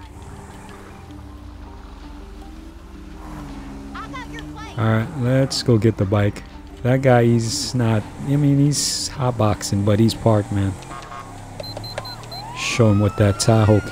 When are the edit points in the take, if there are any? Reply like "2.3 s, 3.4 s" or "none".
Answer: 12.7 s